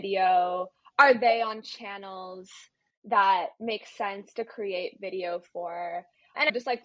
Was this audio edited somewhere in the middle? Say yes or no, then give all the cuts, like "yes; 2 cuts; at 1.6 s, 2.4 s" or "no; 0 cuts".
no; 0 cuts